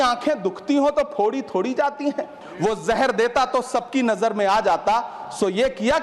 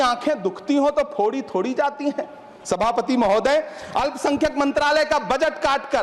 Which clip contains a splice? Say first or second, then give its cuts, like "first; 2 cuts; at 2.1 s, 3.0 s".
first; 1 cut; at 2.4 s